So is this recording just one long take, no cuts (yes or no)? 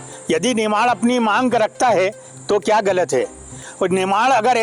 yes